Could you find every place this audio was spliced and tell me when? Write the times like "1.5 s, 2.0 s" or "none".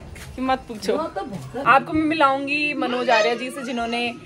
1.6 s